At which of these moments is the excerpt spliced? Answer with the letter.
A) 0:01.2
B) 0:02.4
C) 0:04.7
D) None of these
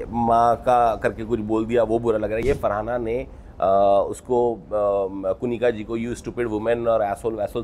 B